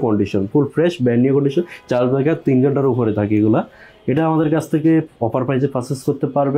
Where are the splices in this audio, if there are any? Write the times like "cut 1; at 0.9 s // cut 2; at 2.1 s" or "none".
none